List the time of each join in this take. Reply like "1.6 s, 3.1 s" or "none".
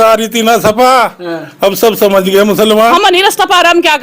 2.9 s